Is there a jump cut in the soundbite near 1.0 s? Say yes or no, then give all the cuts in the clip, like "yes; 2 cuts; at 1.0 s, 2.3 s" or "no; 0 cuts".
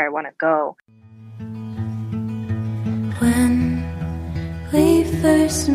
yes; 1 cut; at 1.0 s